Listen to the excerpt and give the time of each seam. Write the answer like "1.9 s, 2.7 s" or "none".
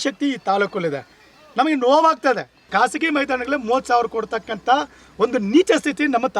2.5 s